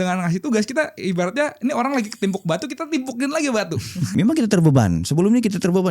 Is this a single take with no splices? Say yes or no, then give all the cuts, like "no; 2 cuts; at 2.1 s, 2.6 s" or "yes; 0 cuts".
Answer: no; 1 cut; at 4.1 s